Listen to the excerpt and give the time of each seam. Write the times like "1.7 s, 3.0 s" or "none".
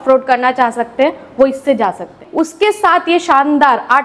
2.2 s

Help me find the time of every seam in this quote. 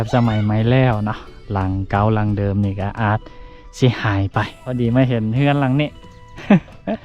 4.6 s

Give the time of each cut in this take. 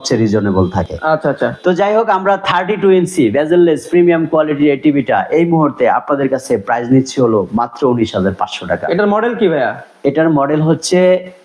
none

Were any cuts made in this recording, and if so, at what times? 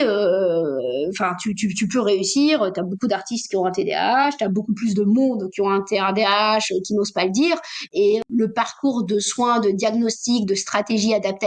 8.3 s

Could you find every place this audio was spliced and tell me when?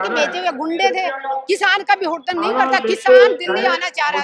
none

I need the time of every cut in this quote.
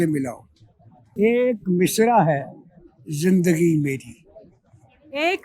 1.1 s

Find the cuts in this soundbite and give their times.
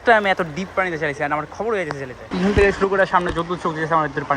2.2 s

